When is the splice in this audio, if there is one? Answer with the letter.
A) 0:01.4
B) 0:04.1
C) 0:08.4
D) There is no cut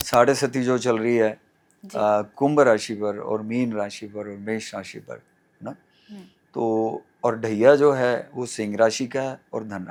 D